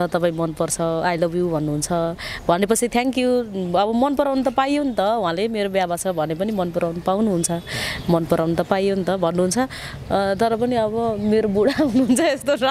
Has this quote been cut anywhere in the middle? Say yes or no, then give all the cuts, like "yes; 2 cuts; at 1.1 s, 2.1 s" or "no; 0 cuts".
no; 0 cuts